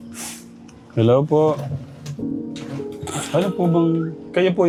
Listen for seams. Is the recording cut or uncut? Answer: uncut